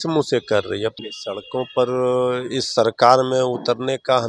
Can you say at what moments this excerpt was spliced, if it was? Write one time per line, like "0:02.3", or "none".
0:01.1